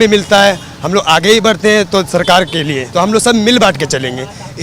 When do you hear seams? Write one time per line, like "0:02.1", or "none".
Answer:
0:02.8